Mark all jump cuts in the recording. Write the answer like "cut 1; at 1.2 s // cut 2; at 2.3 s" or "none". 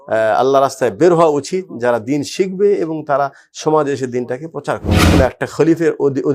cut 1; at 4.9 s